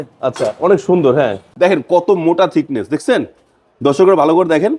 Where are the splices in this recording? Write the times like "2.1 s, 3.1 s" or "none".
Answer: 1.5 s